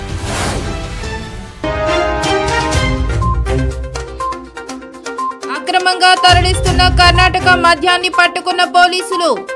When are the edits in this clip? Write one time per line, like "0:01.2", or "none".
none